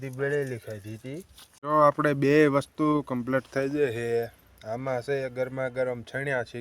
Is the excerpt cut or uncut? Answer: cut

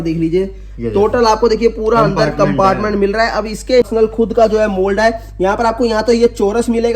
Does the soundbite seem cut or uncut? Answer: cut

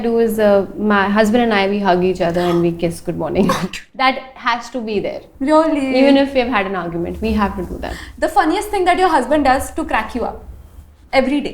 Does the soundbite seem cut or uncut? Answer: uncut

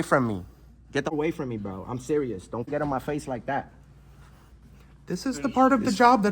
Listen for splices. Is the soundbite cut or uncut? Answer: cut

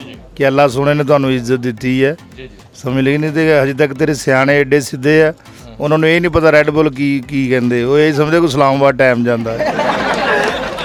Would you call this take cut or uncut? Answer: uncut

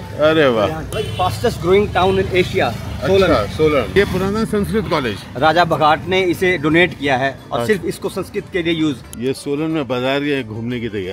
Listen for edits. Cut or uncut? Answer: cut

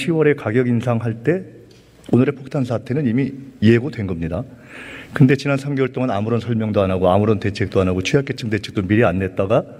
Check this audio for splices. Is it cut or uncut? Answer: uncut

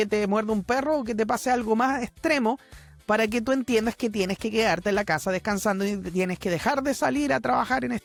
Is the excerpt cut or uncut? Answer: uncut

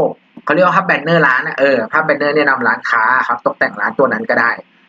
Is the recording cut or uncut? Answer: uncut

